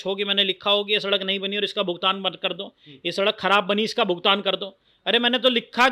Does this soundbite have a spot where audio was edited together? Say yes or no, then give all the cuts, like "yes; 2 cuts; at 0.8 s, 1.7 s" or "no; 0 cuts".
no; 0 cuts